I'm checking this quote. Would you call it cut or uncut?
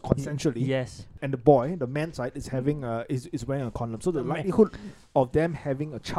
cut